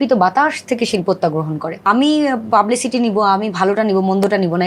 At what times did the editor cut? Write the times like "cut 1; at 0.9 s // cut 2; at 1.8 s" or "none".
cut 1; at 1.8 s